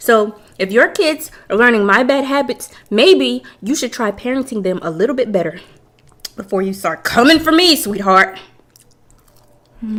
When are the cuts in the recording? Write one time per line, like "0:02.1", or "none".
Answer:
none